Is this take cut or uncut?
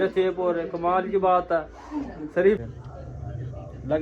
cut